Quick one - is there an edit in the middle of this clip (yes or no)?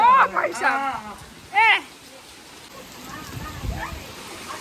yes